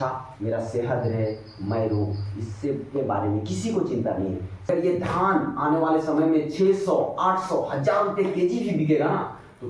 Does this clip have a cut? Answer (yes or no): yes